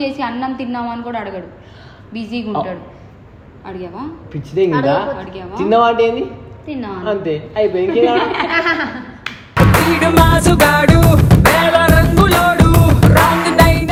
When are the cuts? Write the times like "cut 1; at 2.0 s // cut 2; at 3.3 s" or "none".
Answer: none